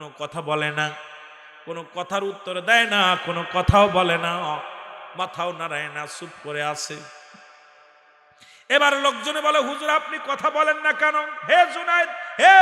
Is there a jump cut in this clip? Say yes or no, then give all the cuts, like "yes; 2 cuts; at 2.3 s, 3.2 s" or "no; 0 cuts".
no; 0 cuts